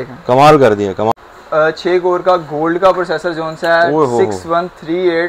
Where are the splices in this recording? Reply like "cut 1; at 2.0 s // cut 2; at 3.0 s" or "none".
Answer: cut 1; at 1.1 s